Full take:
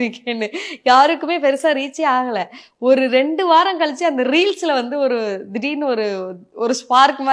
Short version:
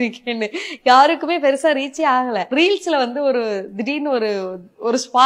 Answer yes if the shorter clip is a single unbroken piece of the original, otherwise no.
no